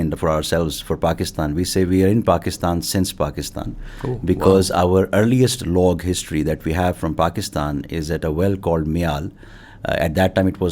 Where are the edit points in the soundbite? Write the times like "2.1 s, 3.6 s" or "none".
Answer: none